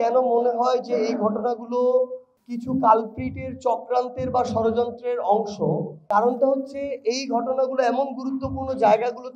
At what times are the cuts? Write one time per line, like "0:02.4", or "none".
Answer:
none